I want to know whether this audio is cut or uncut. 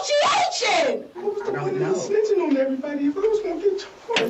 cut